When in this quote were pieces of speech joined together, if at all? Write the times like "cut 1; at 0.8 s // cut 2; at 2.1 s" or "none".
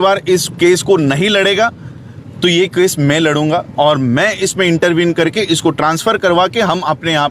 none